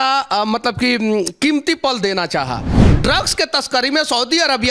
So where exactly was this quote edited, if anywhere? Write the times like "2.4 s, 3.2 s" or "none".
2.7 s